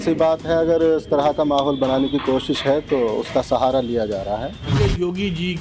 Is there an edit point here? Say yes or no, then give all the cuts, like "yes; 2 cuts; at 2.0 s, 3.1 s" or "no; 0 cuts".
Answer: yes; 1 cut; at 4.7 s